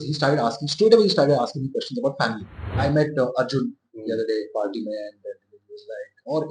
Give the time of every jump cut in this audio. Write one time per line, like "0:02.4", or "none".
0:02.7

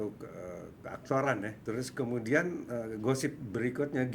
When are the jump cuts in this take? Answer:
0:01.6

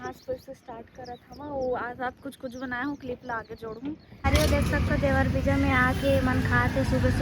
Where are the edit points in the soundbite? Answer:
0:04.2

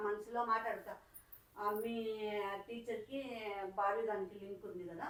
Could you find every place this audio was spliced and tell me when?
none

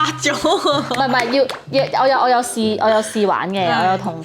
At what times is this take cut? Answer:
none

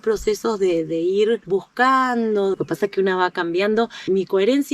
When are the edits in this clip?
0:02.5

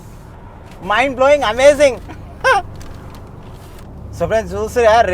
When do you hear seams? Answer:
0:03.8

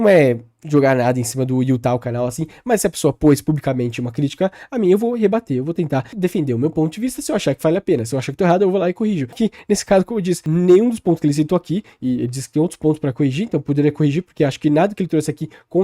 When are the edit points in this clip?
0:06.1
0:09.3
0:10.4

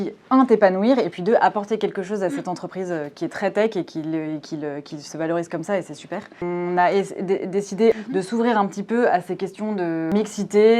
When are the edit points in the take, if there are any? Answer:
0:06.4
0:08.0
0:10.1

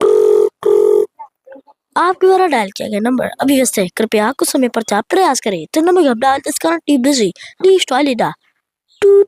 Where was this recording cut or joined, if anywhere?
none

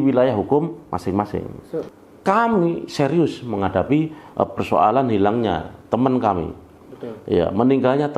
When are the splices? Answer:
0:01.6

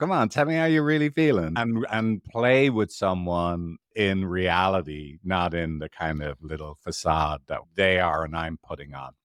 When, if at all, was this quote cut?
0:01.6
0:07.7

